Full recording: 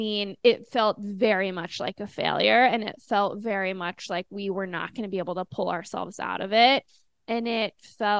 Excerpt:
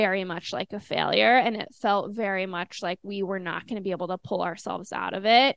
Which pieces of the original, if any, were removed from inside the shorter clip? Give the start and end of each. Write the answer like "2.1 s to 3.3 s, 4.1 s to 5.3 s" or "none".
none

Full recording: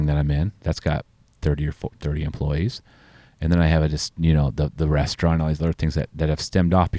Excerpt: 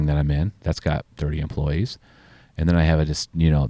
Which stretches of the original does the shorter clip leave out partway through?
1.1 s to 2.0 s

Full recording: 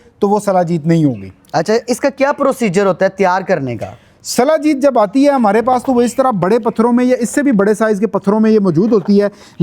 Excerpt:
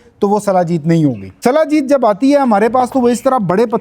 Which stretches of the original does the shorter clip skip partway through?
1.3 s to 4.2 s

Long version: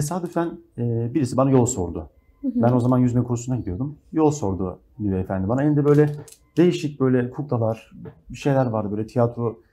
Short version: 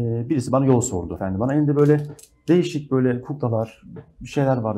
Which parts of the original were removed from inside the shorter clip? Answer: 2.1 s to 5.3 s

